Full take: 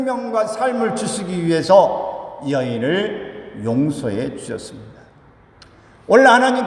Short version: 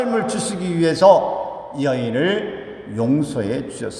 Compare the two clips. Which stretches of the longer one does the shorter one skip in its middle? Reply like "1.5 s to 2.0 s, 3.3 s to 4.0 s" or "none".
none